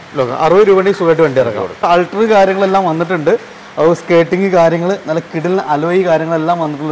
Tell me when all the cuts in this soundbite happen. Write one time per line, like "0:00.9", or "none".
0:01.9

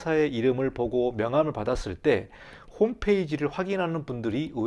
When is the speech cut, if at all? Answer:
none

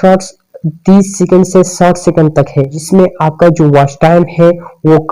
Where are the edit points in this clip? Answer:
0:02.8

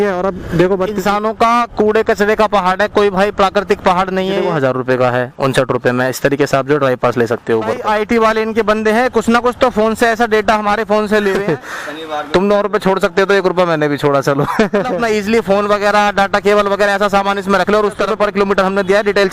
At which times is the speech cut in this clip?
0:01.0
0:04.4
0:07.8
0:11.4
0:14.9
0:18.1

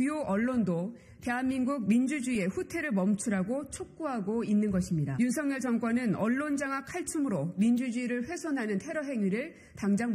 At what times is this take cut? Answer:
0:05.1

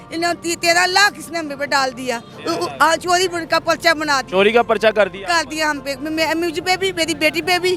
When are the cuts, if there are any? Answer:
none

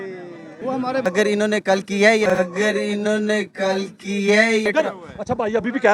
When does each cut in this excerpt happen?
0:00.9

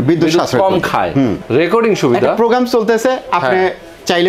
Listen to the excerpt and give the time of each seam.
0:01.4

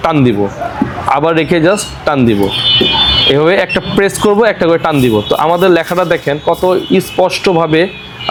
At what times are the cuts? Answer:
none

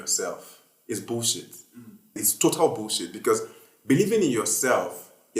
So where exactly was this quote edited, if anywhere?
0:02.2

